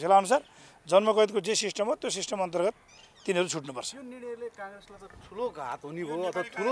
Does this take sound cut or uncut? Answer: uncut